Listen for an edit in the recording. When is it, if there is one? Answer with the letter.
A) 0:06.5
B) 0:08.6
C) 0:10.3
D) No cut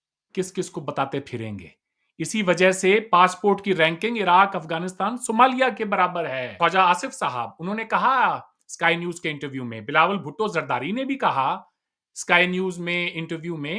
A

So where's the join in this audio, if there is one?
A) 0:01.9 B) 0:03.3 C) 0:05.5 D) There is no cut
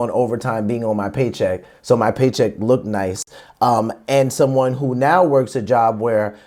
D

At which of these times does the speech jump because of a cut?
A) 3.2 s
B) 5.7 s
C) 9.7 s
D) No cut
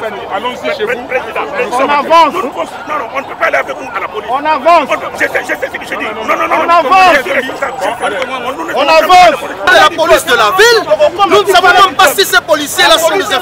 C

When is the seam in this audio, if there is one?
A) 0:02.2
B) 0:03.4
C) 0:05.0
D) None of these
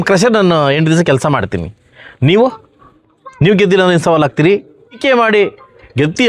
C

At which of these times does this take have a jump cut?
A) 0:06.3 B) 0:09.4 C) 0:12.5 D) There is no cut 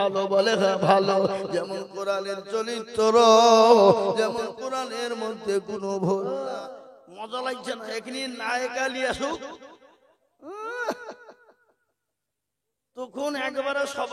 A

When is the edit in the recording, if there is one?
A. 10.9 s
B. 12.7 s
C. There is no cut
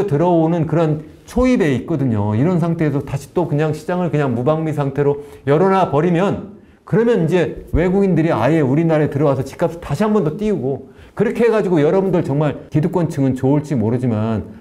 C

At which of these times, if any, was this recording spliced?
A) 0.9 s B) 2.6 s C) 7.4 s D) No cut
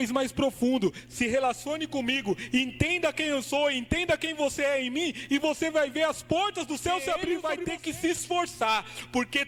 C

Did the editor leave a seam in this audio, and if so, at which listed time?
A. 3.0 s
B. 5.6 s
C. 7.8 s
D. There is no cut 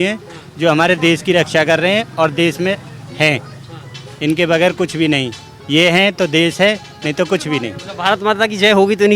D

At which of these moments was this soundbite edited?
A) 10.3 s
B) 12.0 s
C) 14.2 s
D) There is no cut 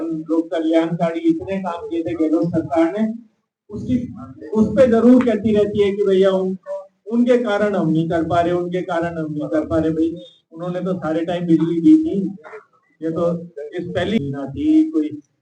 C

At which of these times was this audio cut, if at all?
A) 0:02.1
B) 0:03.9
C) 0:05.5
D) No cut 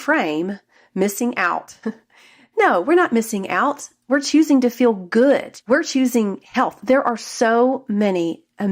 C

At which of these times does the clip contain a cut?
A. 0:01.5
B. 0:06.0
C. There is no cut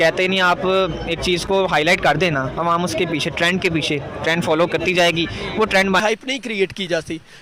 B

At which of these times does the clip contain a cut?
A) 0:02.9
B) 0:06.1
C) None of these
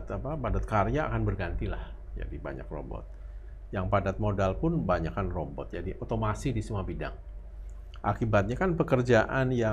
C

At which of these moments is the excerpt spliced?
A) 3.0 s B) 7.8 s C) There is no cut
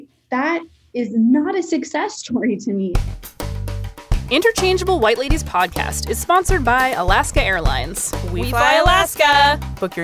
A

